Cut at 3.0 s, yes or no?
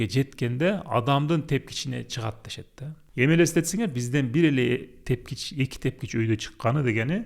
yes